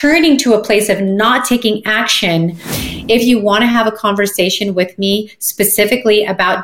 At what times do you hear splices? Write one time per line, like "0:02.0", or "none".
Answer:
0:02.7